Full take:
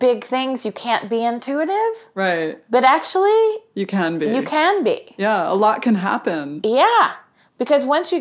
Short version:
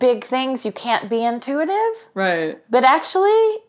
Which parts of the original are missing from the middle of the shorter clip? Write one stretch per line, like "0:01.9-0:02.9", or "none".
none

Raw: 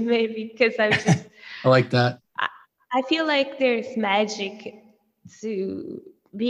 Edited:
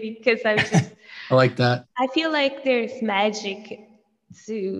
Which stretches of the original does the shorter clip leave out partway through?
0:02.2-0:02.8

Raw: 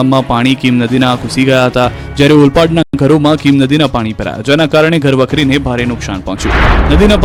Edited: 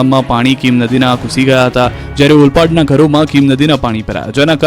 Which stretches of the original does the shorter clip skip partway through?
0:02.9-0:03.0

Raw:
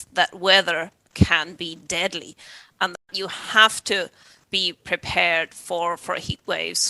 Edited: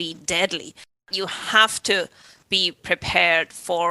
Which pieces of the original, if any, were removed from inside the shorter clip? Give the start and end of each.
0:02.6-0:03.0

